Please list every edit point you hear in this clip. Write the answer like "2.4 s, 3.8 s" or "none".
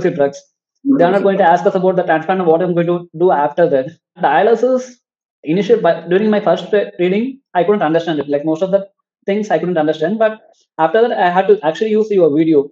4.1 s